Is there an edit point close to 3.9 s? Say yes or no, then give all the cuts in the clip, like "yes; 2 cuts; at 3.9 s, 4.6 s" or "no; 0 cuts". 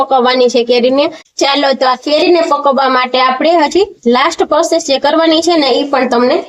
no; 1 cut; at 1.2 s